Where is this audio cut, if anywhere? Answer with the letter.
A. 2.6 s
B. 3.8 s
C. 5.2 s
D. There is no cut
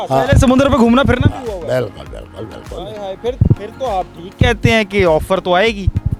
D